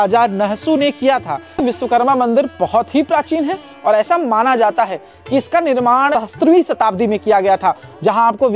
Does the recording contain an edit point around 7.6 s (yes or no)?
no